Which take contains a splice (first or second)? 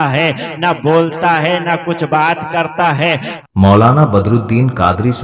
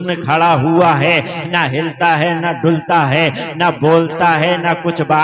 first